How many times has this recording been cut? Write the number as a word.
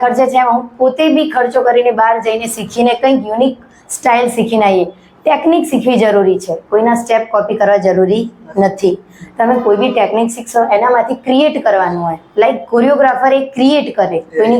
zero